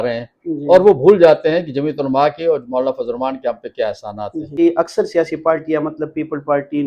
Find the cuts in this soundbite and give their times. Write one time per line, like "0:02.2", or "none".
0:04.6